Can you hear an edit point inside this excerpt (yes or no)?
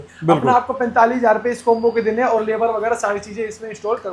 no